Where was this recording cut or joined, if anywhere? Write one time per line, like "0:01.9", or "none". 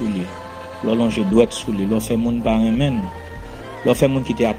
none